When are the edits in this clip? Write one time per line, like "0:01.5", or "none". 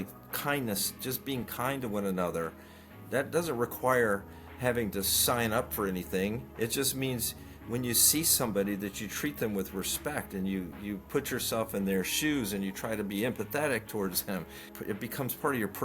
0:14.7